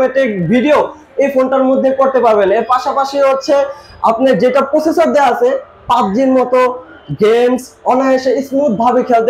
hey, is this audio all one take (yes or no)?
yes